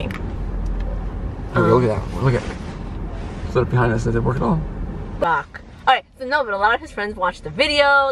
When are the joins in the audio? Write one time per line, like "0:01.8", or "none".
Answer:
0:05.2